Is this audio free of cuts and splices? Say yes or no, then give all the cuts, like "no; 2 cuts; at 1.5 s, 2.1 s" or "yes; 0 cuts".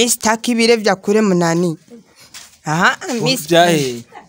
yes; 0 cuts